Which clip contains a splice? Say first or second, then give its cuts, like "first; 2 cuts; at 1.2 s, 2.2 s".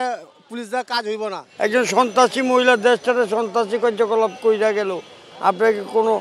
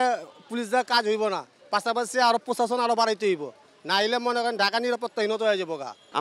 first; 1 cut; at 1.4 s